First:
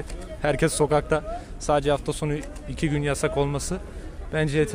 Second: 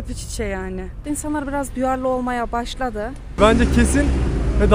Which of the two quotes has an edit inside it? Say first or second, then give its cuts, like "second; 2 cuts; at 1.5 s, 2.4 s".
second; 2 cuts; at 1.0 s, 3.4 s